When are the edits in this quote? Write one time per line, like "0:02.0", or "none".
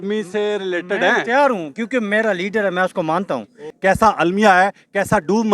0:03.6